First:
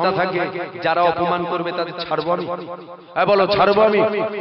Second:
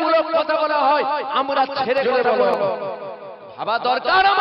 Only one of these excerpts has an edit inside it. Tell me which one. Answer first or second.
second